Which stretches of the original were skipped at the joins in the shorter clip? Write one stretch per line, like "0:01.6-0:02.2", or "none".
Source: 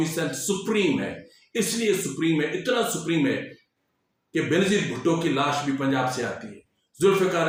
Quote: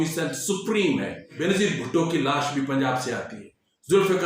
0:01.4-0:04.5

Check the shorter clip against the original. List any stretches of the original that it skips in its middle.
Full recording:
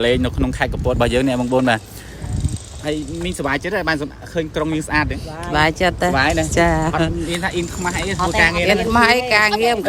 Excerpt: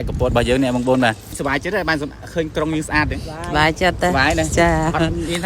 0:02.0-0:03.3

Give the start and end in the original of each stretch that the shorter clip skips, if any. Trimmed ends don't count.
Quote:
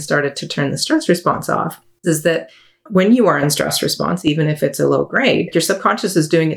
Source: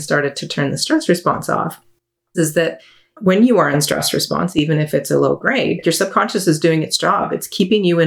0:01.8-0:02.2

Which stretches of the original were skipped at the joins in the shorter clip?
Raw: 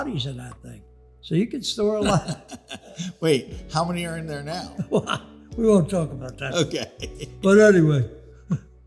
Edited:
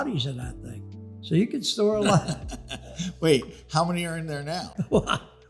none

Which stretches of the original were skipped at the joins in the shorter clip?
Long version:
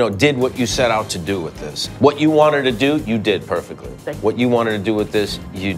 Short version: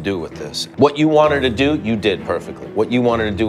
0:03.8-0:04.0

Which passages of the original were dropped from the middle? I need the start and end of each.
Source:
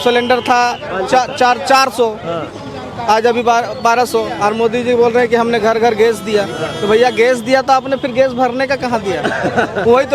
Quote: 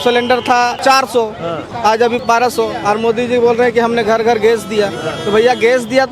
0:00.8-0:01.6
0:03.0-0:03.7

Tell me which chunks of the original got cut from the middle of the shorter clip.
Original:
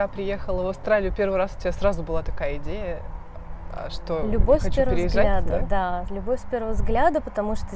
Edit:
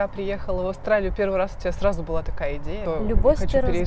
0:02.8-0:04.0

